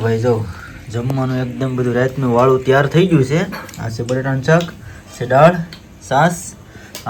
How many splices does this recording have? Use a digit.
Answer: 0